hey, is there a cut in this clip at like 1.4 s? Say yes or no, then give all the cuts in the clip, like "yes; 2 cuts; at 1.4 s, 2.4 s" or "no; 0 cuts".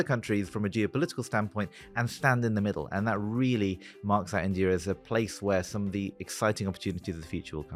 no; 0 cuts